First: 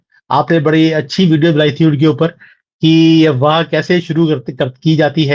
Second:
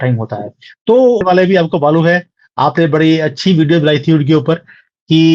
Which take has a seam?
second; 1 cut; at 1.2 s

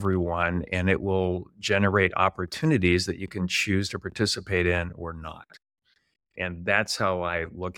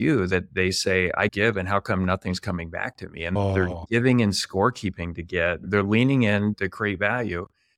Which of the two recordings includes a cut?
second; 3 cuts; at 3.4 s, 5.7 s, 6.6 s

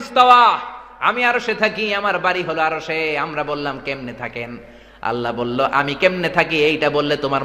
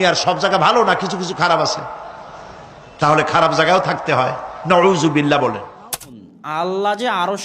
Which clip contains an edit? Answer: second; 1 cut; at 6.3 s

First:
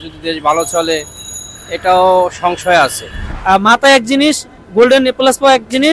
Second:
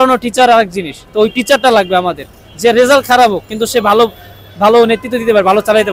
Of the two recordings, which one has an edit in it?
first; 1 cut; at 3.2 s

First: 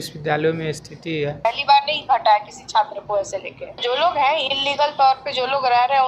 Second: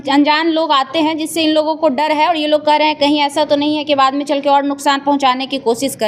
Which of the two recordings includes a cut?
first; 2 cuts; at 1.4 s, 3.8 s

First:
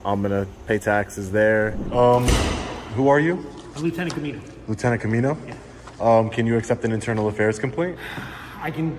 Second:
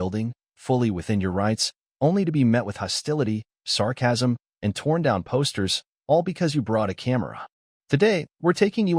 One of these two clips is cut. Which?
first; 1 cut; at 1.8 s

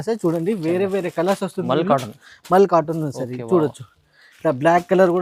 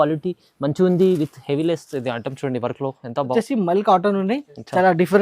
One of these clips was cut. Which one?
second; 1 cut; at 3.3 s

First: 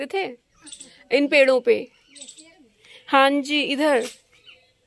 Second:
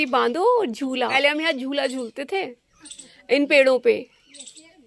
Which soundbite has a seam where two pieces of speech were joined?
second; 1 cut; at 1.1 s

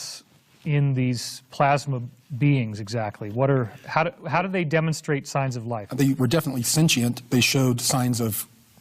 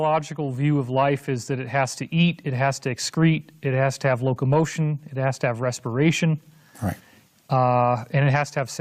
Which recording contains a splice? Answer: second; 1 cut; at 1.0 s

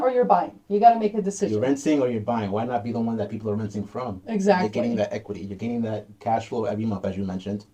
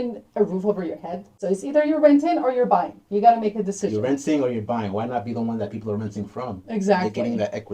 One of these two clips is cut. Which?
second; 1 cut; at 1.4 s

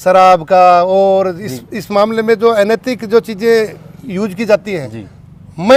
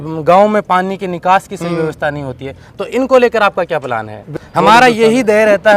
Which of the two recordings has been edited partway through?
second; 1 cut; at 4.4 s

